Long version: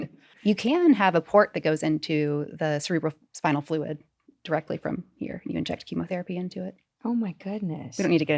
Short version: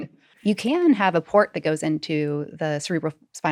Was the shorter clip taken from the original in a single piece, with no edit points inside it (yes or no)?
yes